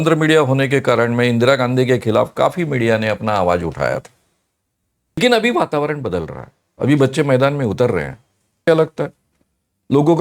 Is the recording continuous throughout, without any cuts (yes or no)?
no